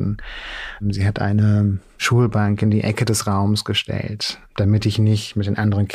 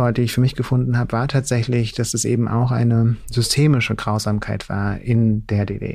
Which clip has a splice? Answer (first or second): first